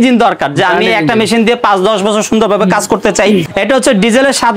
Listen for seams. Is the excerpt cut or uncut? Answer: cut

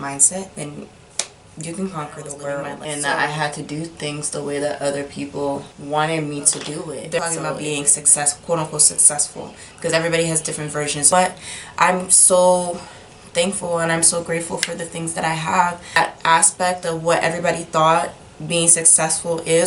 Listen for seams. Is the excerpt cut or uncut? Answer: cut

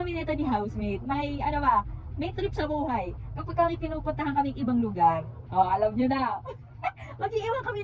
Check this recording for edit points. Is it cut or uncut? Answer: uncut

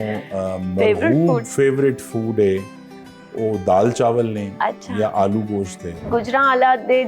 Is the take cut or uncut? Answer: cut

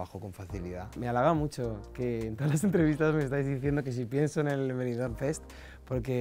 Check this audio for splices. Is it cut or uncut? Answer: cut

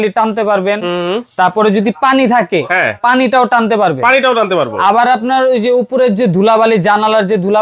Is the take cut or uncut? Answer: uncut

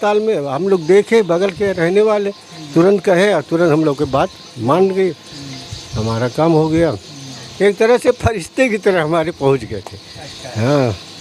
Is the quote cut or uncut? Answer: uncut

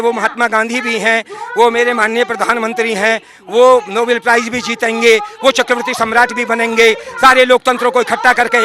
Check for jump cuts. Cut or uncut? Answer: uncut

